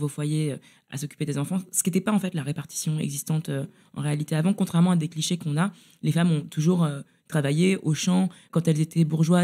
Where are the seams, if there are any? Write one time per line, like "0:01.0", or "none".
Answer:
0:08.4